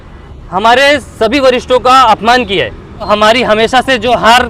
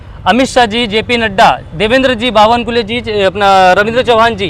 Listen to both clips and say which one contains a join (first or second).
first